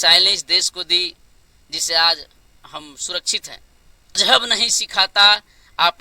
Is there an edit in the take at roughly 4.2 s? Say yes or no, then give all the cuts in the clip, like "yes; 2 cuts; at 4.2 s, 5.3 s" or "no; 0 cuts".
yes; 1 cut; at 4.2 s